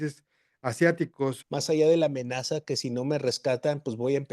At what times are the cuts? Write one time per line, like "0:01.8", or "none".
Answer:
0:01.4